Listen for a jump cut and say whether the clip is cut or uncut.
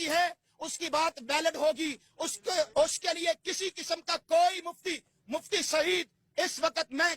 cut